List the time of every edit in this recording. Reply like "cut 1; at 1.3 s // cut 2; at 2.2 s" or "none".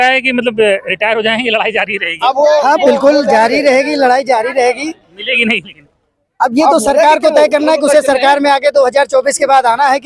none